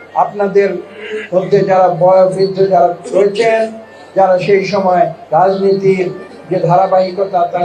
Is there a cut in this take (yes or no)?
no